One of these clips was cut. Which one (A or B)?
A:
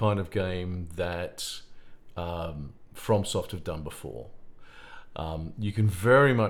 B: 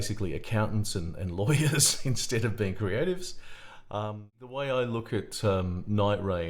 B